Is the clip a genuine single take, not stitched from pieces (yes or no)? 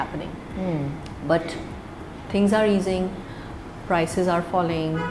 yes